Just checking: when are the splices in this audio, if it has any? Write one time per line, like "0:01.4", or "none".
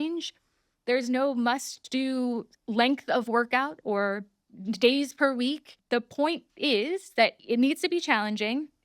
0:05.7
0:07.4